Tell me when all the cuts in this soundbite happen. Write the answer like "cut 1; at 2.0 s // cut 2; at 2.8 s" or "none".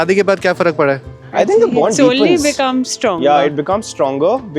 cut 1; at 1.0 s